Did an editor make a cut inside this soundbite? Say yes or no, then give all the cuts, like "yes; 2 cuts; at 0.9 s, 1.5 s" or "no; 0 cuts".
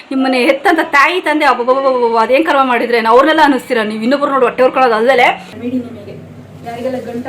yes; 1 cut; at 5.5 s